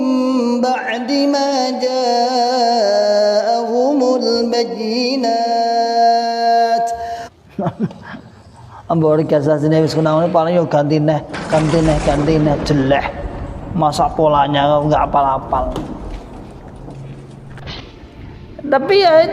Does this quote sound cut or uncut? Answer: cut